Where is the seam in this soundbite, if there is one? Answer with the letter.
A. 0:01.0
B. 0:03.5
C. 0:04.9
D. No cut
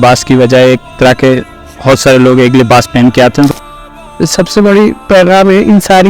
B